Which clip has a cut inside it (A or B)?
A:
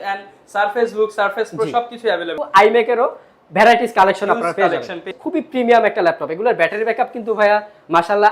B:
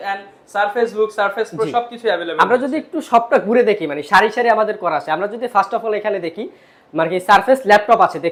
A